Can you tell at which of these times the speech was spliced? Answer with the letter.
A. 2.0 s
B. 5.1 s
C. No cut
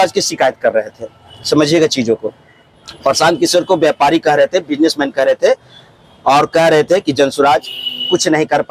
C